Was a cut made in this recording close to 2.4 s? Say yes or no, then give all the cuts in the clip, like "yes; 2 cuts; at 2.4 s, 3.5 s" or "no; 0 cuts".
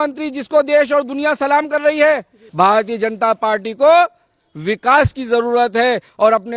yes; 1 cut; at 2.4 s